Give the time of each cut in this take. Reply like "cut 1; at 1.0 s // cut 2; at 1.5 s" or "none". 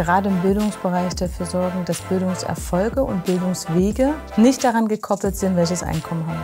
none